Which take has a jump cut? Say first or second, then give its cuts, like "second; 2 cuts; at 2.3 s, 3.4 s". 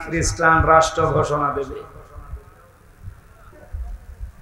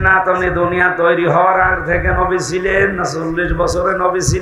first; 1 cut; at 3.4 s